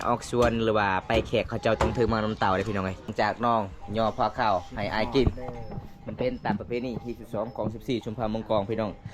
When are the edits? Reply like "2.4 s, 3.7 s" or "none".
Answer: 3.0 s